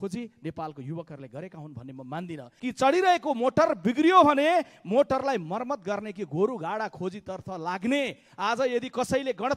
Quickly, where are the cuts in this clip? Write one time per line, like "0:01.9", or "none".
0:02.4